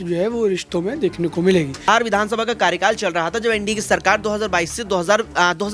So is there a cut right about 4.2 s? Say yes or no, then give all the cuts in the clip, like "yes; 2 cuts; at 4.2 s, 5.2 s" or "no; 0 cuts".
no; 1 cut; at 1.8 s